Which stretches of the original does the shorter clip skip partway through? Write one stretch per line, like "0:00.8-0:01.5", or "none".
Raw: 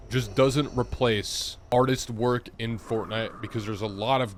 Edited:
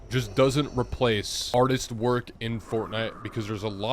0:01.3-0:01.5